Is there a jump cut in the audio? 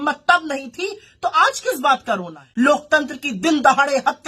yes; 1 cut; at 2.4 s

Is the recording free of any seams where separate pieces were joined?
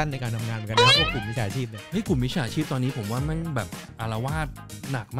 yes; 0 cuts

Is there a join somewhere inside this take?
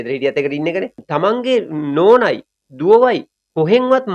yes; 1 cut; at 1.0 s

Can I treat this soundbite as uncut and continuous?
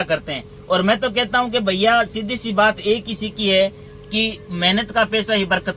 yes; 0 cuts

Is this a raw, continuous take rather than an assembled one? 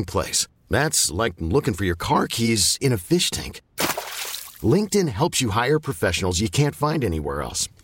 yes; 0 cuts

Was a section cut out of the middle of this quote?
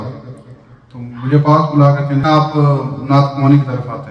yes; 1 cut; at 2.2 s

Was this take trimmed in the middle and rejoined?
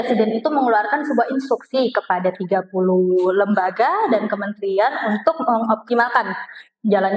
no; 0 cuts

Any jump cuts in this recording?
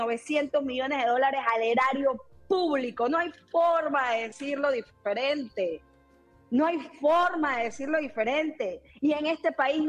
no; 0 cuts

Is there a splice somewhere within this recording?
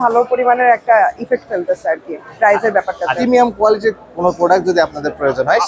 yes; 1 cut; at 3.2 s

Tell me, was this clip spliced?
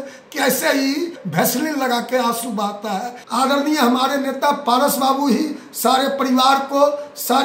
yes; 2 cuts; at 1.2 s, 3.2 s

